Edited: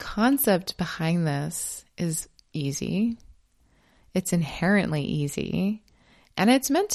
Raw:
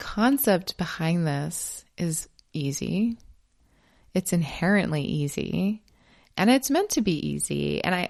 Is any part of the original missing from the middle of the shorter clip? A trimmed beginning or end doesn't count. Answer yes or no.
no